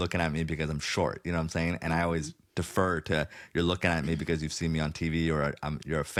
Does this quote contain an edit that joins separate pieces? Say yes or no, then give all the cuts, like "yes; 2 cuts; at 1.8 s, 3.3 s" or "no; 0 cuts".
no; 0 cuts